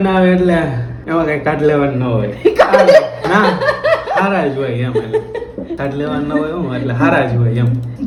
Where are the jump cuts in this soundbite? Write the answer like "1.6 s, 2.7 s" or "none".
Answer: none